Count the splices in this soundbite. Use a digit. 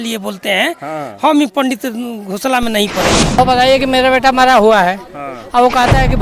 1